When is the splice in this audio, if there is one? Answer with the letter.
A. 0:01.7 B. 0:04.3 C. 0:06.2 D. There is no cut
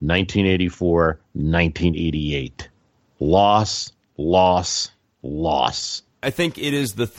C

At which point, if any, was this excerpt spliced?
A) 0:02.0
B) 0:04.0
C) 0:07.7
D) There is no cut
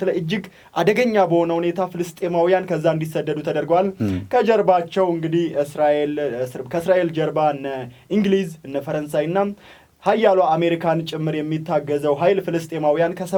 D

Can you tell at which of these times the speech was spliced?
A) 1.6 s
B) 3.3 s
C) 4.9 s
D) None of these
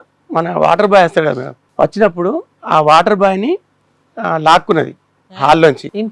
A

